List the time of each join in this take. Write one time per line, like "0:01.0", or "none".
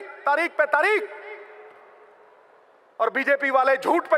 none